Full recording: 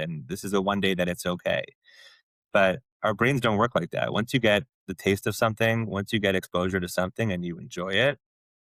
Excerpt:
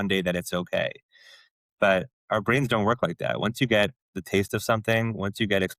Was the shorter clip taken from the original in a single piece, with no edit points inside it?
yes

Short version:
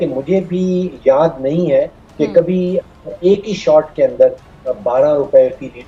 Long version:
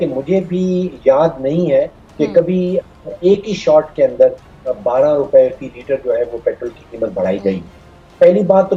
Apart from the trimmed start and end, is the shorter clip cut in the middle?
no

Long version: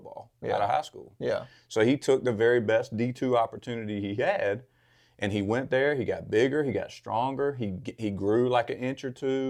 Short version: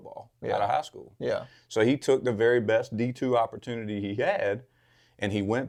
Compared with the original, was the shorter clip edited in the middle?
no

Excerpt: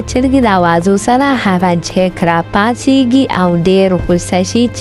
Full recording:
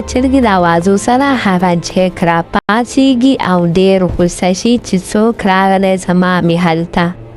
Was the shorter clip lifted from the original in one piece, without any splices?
no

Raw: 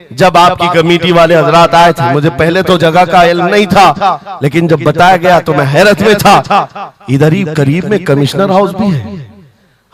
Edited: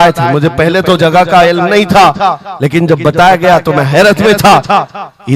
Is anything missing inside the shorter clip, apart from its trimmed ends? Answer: no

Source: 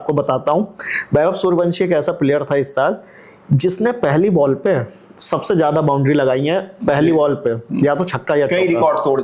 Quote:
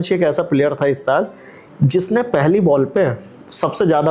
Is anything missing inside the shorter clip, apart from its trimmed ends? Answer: no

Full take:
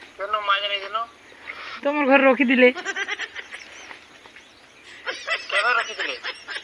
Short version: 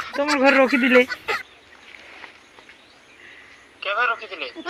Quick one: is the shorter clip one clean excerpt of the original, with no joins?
yes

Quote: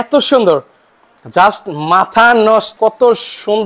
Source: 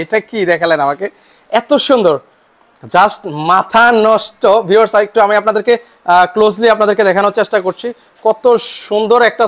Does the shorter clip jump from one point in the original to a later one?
yes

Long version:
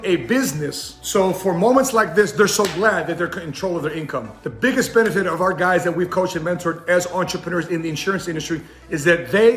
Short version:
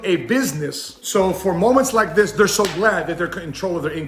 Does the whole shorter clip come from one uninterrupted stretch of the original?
yes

